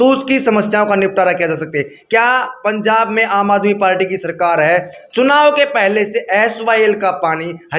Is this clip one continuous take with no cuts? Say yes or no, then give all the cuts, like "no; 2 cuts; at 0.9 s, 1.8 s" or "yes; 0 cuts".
yes; 0 cuts